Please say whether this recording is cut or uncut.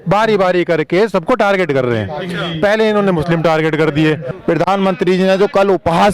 cut